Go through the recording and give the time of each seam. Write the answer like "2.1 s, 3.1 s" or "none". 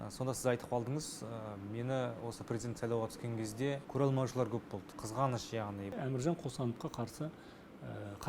5.9 s

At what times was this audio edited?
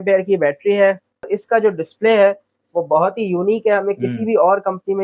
1.4 s

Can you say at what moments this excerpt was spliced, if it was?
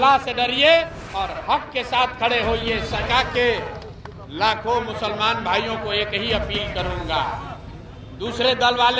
3.0 s

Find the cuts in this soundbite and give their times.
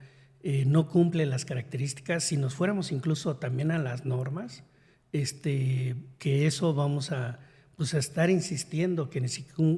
none

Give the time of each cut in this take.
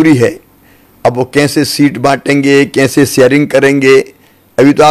none

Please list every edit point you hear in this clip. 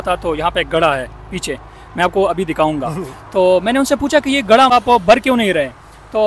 4.7 s

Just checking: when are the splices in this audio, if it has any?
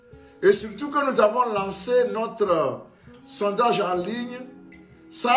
none

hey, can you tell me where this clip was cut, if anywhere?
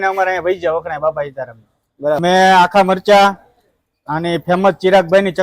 2.2 s

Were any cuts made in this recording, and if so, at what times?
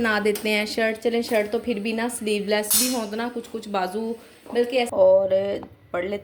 4.9 s

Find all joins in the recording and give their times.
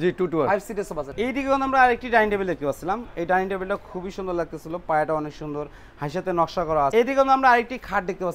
1.1 s, 6.9 s

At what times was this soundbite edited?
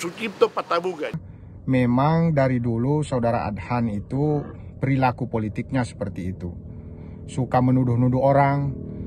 1.1 s

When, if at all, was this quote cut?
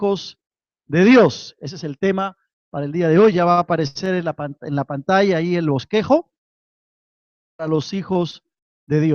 none

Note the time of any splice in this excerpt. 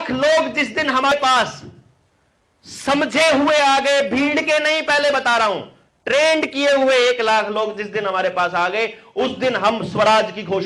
1.1 s

